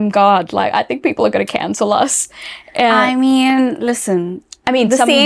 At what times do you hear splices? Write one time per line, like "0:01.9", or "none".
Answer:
none